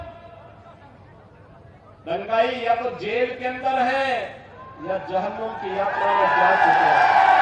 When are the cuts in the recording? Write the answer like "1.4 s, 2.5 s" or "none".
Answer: none